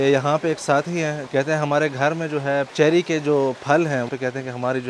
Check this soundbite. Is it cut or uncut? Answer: cut